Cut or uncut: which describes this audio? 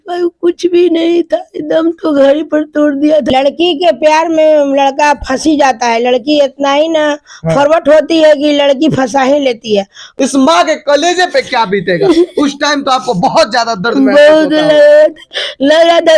cut